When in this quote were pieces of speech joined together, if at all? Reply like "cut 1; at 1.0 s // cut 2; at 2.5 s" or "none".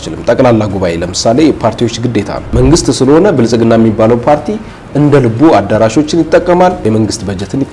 cut 1; at 2.4 s // cut 2; at 6.8 s